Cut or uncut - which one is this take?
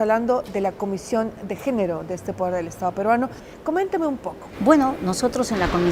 uncut